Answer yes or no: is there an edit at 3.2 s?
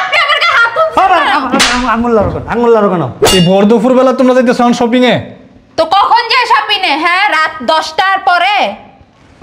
yes